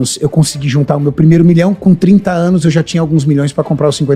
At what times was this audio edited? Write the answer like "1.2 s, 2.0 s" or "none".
none